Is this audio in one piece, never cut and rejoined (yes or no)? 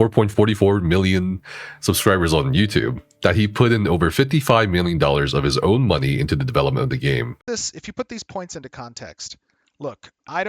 no